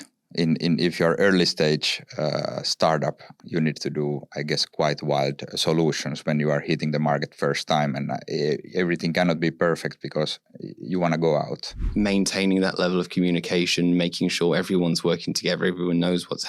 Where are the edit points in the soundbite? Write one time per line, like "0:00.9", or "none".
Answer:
0:03.3
0:11.8